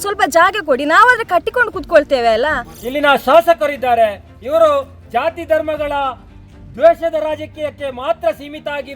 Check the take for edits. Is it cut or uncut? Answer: cut